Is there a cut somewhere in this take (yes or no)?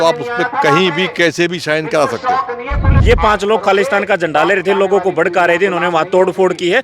yes